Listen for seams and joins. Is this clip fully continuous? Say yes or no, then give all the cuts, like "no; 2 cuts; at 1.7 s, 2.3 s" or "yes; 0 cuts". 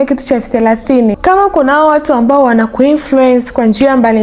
no; 1 cut; at 1.2 s